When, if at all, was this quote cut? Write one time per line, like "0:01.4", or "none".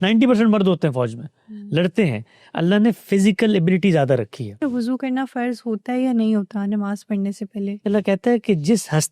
0:04.6
0:07.9